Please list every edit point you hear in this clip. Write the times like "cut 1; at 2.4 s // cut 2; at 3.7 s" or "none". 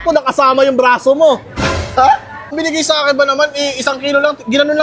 cut 1; at 2.4 s